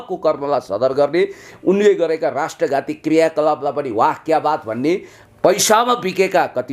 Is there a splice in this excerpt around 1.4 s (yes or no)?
no